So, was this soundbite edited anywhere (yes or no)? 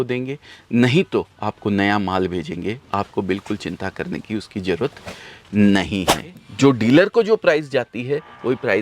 yes